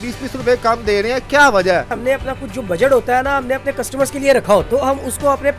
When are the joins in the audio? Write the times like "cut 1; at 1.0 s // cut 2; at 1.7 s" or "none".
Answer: cut 1; at 1.9 s // cut 2; at 4.7 s

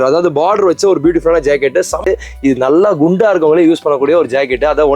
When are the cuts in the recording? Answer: cut 1; at 2.1 s

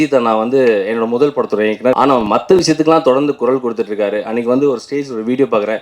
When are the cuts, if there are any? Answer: cut 1; at 1.9 s

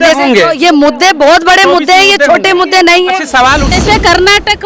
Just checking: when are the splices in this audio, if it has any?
cut 1; at 3.7 s

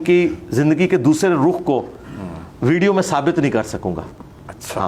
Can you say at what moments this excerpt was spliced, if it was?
none

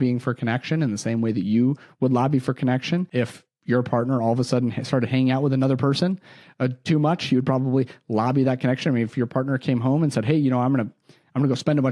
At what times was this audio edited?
cut 1; at 3.1 s

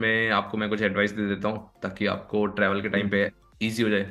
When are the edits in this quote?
none

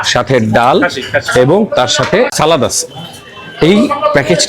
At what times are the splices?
cut 1; at 2.3 s

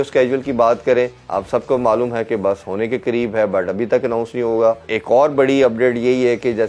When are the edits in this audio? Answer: cut 1; at 1.2 s // cut 2; at 4.9 s

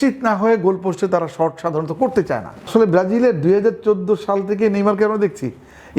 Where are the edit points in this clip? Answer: cut 1; at 2.7 s

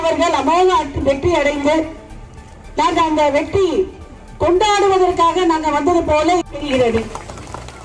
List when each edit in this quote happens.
cut 1; at 6.5 s

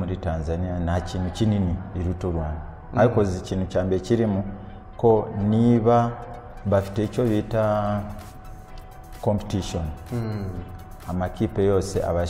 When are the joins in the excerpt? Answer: none

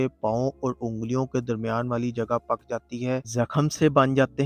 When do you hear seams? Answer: none

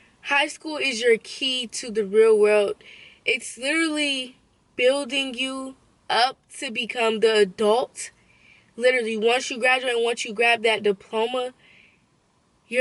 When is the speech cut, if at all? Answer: none

